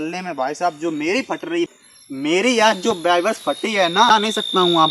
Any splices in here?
yes; 2 cuts; at 1.7 s, 4.1 s

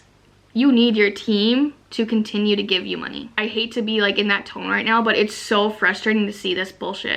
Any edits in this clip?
yes; 1 cut; at 3.4 s

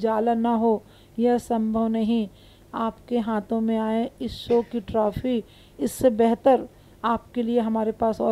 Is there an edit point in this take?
no; 0 cuts

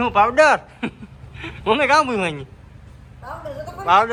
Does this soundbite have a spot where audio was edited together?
no; 0 cuts

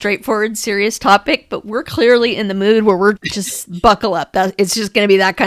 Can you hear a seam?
yes; 1 cut; at 3.2 s

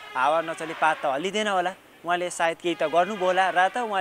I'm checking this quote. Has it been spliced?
no; 0 cuts

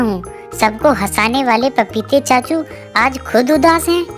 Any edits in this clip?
no; 0 cuts

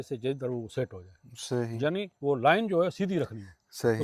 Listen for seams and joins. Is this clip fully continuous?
yes; 0 cuts

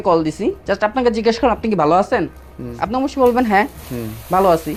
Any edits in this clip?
no; 0 cuts

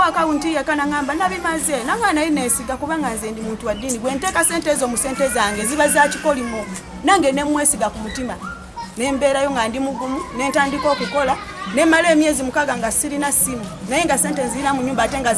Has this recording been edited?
no; 0 cuts

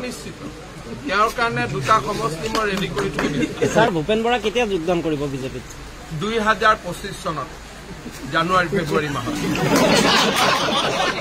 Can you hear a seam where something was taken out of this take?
yes; 1 cut; at 3.9 s

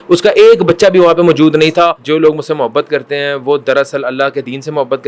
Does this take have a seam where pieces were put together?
yes; 1 cut; at 2.0 s

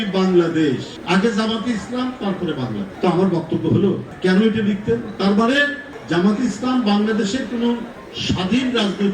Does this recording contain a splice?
yes; 2 cuts; at 0.9 s, 2.9 s

